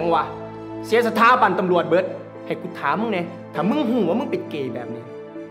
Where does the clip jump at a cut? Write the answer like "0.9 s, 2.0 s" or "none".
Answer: 2.3 s, 3.4 s

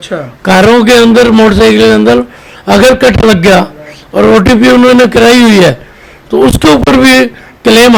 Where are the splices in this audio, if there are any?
none

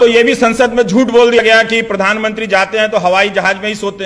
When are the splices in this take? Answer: 1.4 s

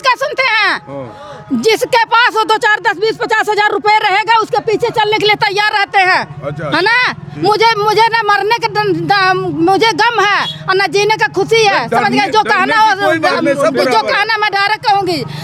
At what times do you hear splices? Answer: none

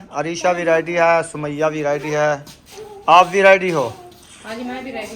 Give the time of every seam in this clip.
none

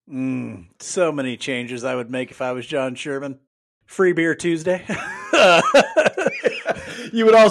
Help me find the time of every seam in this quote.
6.3 s

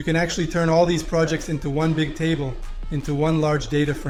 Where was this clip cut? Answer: none

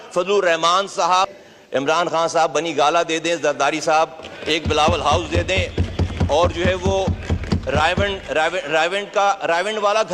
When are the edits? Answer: 1.3 s

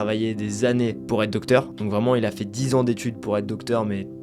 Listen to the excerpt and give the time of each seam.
none

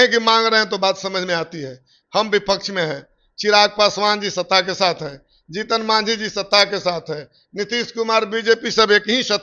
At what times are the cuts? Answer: none

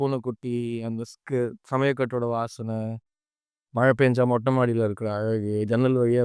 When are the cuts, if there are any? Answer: none

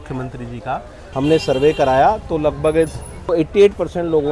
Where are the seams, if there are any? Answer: 1.0 s, 3.3 s

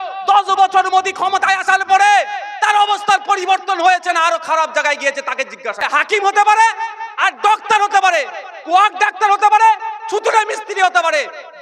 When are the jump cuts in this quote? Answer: 5.8 s

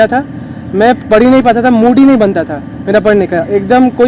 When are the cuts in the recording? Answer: none

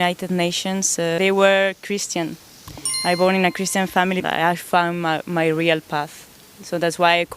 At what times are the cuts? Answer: 1.2 s, 4.2 s

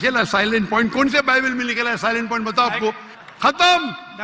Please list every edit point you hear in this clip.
3.1 s

